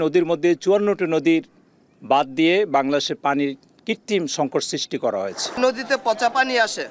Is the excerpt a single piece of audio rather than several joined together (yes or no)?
no